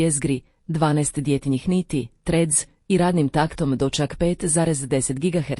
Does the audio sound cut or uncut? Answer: uncut